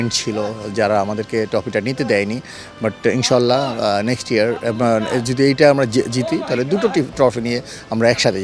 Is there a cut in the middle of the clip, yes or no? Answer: no